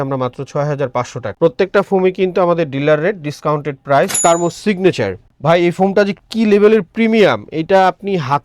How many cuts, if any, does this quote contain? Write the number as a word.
two